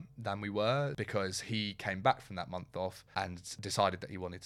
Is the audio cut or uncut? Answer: cut